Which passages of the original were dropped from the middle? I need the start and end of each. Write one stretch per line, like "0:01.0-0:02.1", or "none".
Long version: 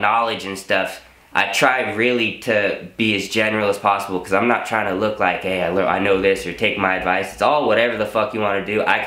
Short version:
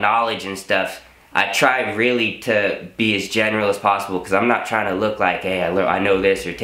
none